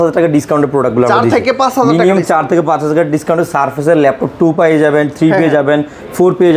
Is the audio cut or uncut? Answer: uncut